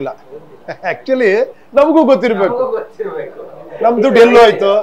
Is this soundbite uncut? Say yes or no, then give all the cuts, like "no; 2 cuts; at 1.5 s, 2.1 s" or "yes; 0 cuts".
yes; 0 cuts